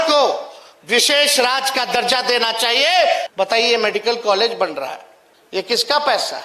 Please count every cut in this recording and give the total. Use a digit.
1